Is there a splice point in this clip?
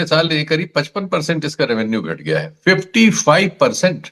no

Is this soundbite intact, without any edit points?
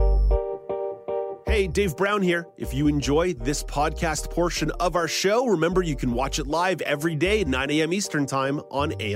yes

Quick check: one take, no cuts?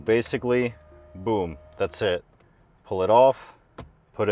yes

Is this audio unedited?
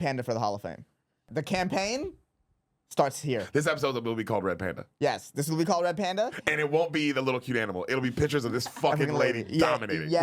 no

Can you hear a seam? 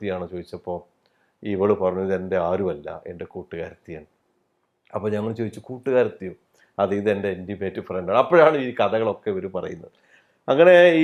no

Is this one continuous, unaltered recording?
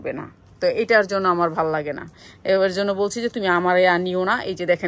yes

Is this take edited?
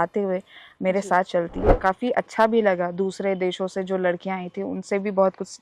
yes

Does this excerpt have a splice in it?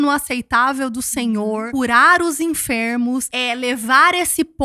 yes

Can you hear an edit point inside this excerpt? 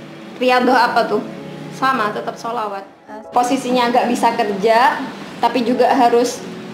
yes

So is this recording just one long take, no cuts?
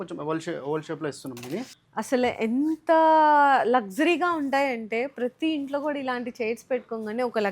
no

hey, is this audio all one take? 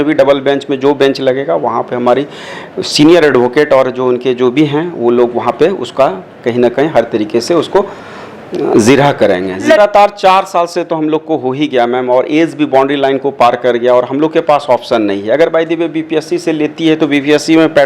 no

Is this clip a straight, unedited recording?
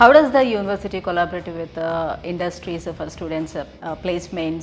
yes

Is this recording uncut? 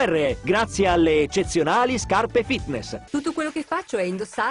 no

